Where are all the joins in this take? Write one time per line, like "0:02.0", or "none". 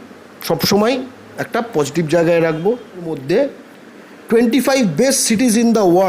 0:03.2